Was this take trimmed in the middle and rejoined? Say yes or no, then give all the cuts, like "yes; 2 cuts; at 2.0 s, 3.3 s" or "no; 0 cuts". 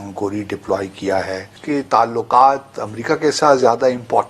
yes; 1 cut; at 1.5 s